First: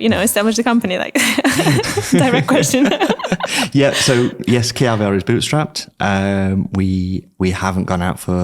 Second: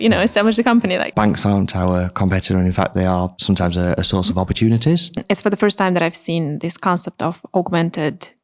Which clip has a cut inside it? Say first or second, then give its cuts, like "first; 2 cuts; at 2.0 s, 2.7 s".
second; 3 cuts; at 1.1 s, 3.7 s, 5.1 s